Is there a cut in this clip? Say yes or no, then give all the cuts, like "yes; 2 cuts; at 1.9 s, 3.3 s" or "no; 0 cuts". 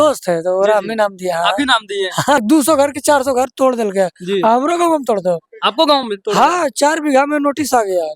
yes; 1 cut; at 2.4 s